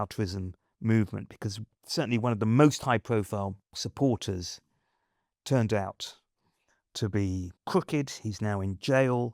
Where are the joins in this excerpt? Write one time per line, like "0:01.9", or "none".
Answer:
0:01.7
0:03.7

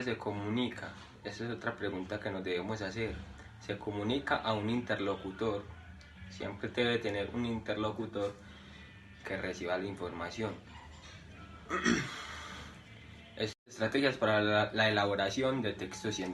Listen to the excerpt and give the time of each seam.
0:13.6

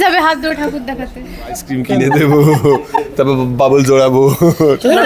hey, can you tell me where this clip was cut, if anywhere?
0:01.7

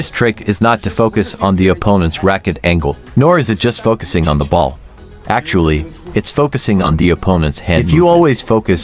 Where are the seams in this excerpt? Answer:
0:07.8

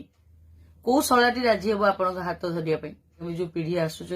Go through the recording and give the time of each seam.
0:03.3

